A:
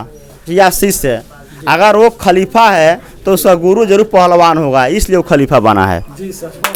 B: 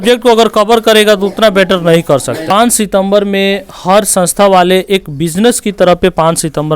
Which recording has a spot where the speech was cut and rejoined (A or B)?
B